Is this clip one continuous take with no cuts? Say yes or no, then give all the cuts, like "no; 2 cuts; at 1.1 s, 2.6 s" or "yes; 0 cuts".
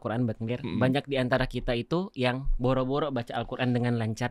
yes; 0 cuts